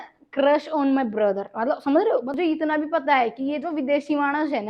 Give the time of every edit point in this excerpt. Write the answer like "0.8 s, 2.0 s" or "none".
2.3 s